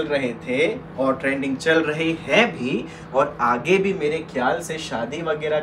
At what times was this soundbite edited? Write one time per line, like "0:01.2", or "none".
none